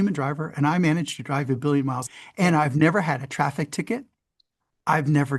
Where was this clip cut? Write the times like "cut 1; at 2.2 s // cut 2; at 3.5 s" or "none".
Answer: cut 1; at 2.0 s